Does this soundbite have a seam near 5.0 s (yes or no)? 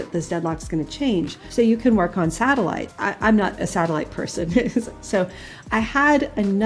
no